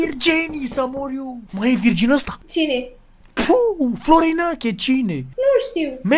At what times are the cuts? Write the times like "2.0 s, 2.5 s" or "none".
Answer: 1.4 s, 2.4 s, 5.2 s